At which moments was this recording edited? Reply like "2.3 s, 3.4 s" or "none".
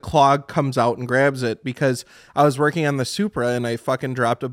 none

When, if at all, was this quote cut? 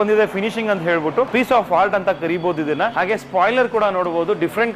1.3 s, 2.9 s

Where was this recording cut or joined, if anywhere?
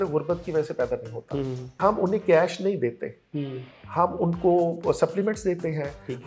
1.8 s

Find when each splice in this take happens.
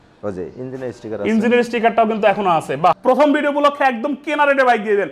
3.0 s

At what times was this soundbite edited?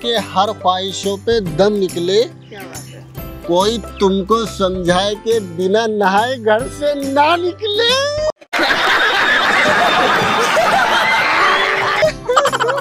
none

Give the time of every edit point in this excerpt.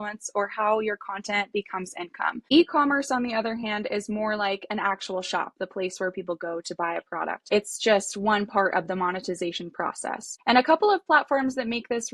2.4 s, 7.4 s, 10.3 s

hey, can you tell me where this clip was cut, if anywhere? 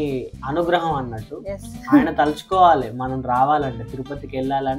none

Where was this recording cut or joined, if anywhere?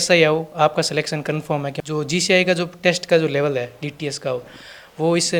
1.8 s

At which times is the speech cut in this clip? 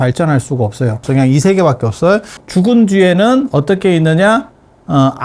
1.0 s, 2.4 s

